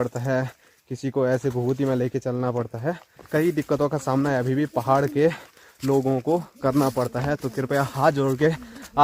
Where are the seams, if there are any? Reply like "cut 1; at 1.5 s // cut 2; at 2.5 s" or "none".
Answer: none